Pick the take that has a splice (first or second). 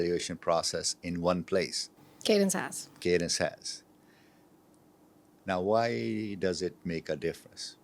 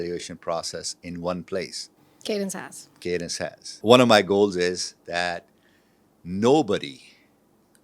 second